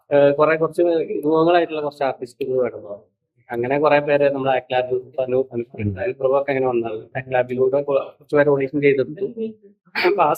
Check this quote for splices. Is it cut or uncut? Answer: uncut